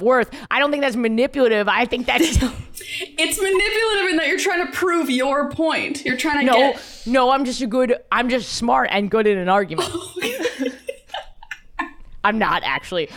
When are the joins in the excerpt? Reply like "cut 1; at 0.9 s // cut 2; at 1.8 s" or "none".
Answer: none